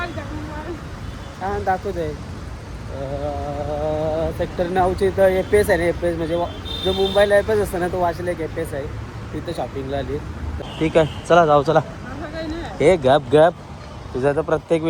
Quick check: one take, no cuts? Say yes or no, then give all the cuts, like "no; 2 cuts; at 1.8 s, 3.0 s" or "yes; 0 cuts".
yes; 0 cuts